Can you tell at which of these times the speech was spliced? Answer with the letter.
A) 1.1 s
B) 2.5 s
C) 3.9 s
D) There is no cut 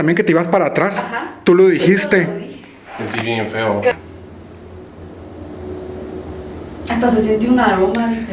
C